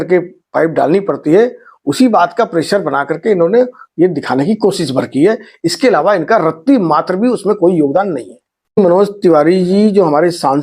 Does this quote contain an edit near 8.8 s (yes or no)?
yes